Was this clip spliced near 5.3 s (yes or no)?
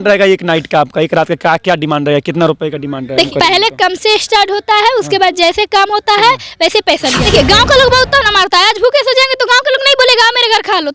no